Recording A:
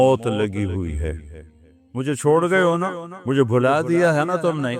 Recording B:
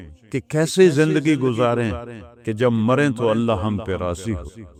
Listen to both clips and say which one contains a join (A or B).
A